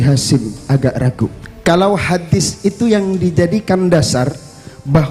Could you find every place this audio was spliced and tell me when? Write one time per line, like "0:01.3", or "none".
0:01.4